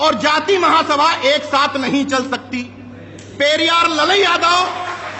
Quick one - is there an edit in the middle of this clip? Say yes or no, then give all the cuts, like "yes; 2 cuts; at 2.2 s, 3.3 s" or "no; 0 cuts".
no; 0 cuts